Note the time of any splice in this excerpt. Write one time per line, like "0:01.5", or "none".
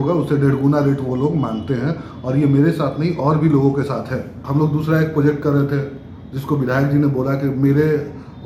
0:04.4